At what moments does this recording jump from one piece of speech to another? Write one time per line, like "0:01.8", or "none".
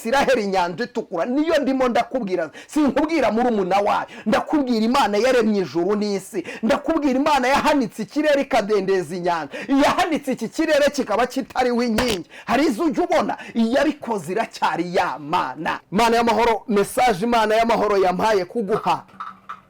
0:15.8